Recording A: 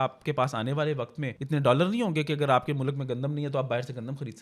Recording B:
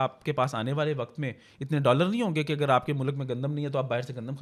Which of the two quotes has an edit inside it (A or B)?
A